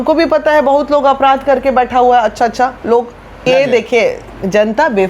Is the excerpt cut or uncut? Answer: cut